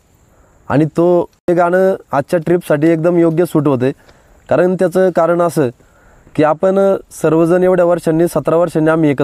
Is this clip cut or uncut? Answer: cut